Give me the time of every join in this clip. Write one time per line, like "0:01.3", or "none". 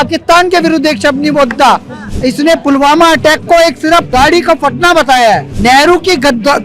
0:04.1
0:05.5